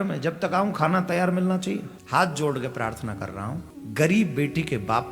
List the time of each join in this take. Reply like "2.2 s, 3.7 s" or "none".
2.0 s, 3.7 s